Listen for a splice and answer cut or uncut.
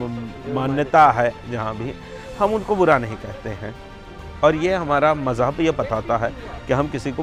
uncut